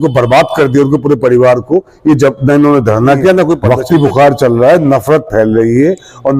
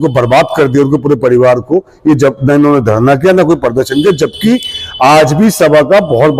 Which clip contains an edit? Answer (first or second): first